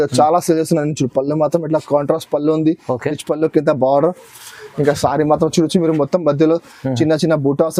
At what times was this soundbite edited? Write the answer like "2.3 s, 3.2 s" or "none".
none